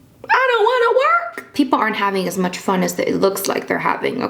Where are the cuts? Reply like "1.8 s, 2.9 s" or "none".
1.5 s